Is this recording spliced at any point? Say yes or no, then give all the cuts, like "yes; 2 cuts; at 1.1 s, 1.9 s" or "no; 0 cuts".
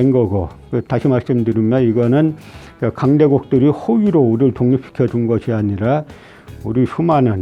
no; 0 cuts